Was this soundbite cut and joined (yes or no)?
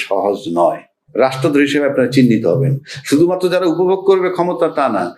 yes